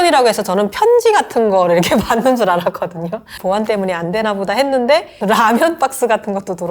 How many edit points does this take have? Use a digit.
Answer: 2